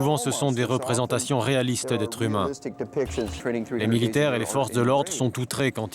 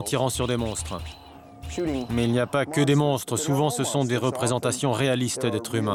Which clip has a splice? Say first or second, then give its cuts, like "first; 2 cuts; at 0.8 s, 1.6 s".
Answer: first; 1 cut; at 3.4 s